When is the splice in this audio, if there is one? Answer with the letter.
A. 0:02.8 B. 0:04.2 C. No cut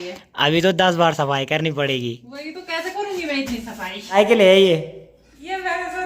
B